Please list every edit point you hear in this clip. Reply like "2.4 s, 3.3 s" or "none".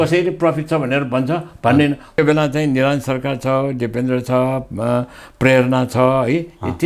2.2 s